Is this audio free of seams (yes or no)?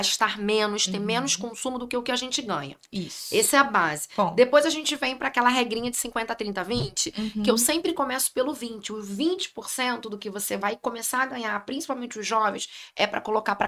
yes